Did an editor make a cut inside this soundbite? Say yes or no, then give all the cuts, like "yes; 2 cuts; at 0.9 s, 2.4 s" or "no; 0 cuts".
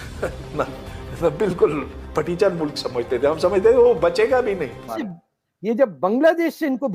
yes; 1 cut; at 5.0 s